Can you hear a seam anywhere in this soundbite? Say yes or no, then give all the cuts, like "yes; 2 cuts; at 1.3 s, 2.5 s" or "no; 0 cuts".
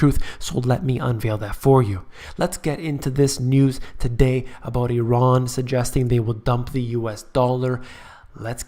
yes; 1 cut; at 7.6 s